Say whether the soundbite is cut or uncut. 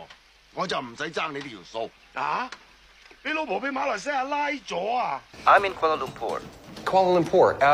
uncut